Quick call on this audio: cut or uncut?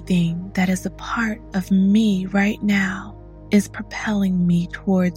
uncut